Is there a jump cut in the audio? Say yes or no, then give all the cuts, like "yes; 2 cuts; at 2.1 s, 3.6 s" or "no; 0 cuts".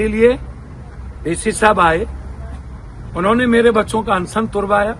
no; 0 cuts